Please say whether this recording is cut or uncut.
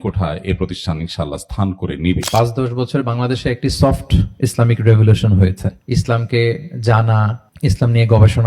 cut